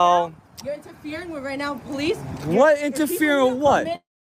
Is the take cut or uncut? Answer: uncut